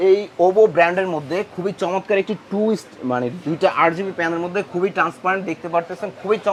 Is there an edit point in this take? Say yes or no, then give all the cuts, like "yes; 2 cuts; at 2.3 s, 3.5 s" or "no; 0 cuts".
no; 0 cuts